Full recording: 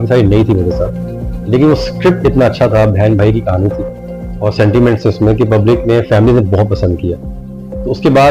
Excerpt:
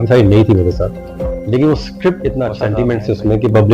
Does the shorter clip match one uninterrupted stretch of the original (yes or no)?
no